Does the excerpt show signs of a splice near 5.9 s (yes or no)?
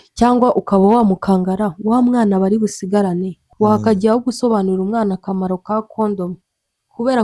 no